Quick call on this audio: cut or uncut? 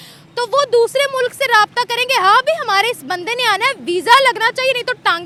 uncut